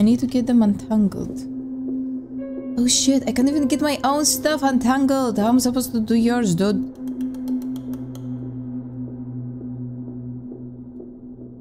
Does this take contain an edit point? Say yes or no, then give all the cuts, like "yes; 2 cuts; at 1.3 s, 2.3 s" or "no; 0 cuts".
no; 0 cuts